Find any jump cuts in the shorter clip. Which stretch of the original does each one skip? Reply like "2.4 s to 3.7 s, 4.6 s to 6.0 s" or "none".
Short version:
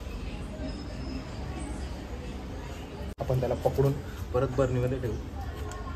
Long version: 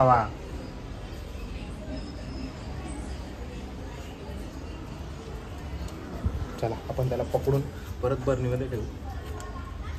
4.4 s to 6.8 s